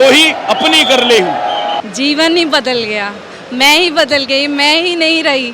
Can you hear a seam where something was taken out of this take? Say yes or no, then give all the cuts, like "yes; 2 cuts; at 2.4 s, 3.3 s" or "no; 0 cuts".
yes; 1 cut; at 1.8 s